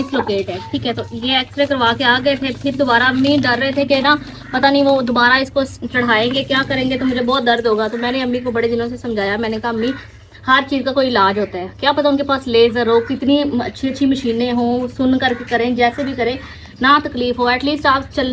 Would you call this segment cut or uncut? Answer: uncut